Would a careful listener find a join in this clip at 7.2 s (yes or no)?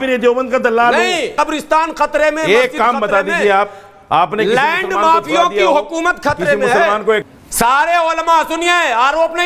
yes